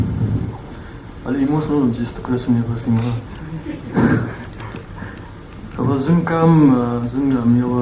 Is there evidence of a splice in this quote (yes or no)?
no